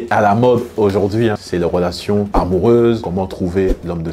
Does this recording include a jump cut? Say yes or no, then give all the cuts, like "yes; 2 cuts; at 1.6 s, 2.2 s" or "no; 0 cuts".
no; 0 cuts